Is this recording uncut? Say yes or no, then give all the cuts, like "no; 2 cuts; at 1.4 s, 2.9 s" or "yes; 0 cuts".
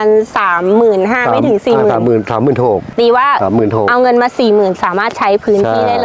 no; 1 cut; at 2.9 s